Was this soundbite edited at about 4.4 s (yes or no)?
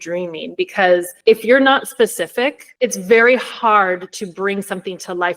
no